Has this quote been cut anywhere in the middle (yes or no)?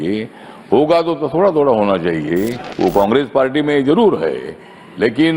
yes